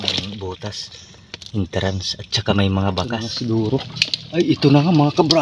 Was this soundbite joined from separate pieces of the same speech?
yes; 1 cut; at 3.2 s

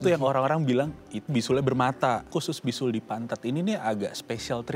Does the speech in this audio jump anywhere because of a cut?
yes; 1 cut; at 2.3 s

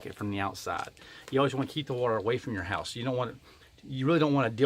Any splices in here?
no; 0 cuts

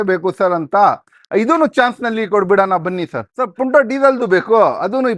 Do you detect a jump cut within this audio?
yes; 1 cut; at 3.4 s

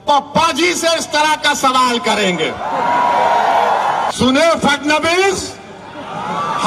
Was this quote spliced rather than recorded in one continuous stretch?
yes; 1 cut; at 4.1 s

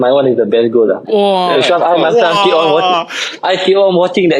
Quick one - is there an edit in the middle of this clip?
no; 0 cuts

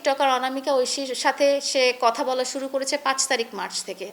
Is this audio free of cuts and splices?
yes; 0 cuts

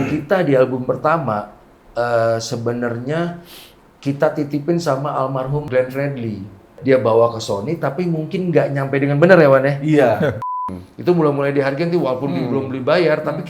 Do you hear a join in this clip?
yes; 2 cuts; at 6.8 s, 10.6 s

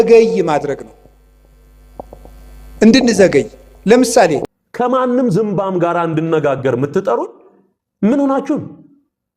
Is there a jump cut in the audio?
yes; 1 cut; at 4.4 s

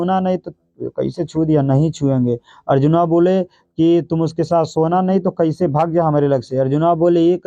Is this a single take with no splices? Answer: yes; 0 cuts

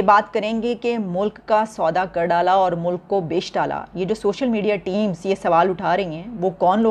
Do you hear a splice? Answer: no; 0 cuts

